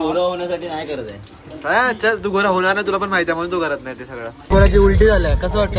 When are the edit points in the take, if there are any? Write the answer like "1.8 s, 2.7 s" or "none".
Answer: 4.4 s